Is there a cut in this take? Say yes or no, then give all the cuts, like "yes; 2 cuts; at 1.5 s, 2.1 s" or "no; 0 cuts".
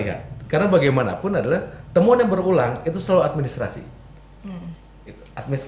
no; 0 cuts